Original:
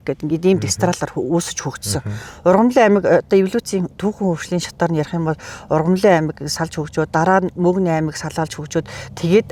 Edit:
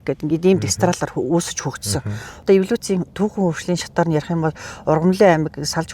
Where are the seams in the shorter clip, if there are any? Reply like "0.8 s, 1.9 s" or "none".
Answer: 2.4 s